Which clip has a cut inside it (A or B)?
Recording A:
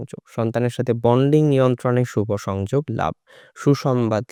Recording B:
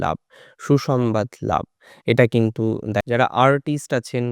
B